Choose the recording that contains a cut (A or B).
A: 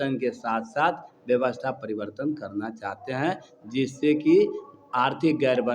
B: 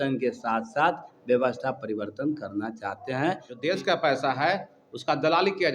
B